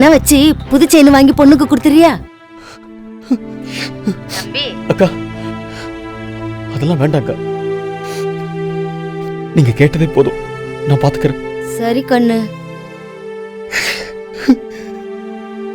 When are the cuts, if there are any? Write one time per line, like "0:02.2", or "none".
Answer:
0:02.2
0:03.6
0:13.0